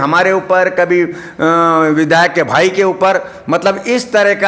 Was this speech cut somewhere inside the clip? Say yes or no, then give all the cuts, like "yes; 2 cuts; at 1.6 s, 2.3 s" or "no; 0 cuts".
no; 0 cuts